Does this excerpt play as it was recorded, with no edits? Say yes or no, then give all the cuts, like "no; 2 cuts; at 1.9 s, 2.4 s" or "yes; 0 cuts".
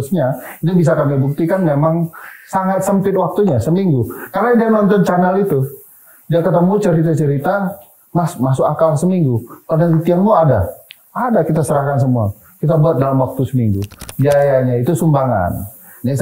no; 1 cut; at 14.0 s